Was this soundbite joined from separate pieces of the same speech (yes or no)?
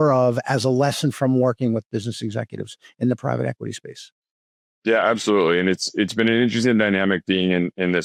no